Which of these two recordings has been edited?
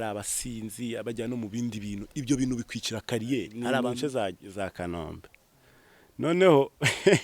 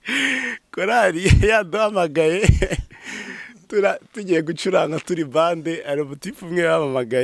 first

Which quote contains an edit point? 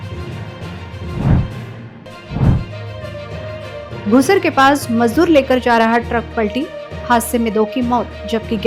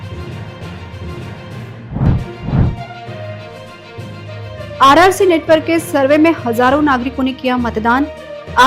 second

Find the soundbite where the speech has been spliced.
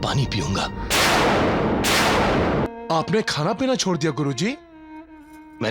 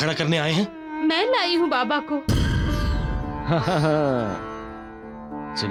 first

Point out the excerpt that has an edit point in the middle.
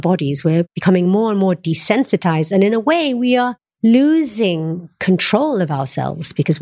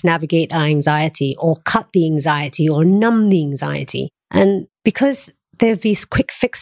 second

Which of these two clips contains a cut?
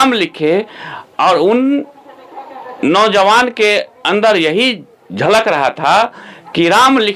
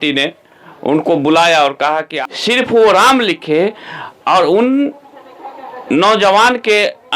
second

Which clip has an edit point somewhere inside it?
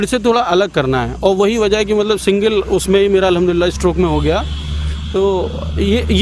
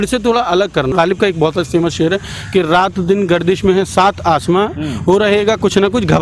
second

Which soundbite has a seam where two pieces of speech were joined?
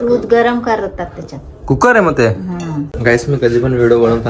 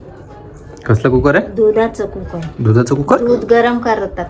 first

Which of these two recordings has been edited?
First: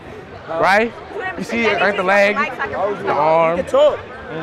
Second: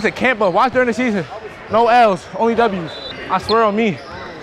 second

